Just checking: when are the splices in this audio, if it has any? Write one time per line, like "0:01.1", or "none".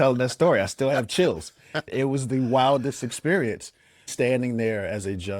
0:01.9
0:04.1